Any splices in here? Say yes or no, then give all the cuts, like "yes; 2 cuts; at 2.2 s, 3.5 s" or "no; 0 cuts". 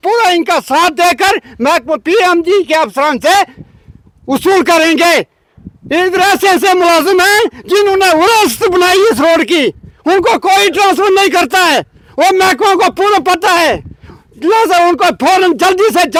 no; 0 cuts